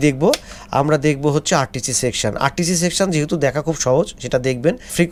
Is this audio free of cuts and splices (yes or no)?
yes